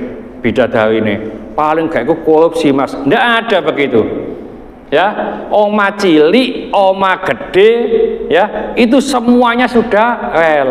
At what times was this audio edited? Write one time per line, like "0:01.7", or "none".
none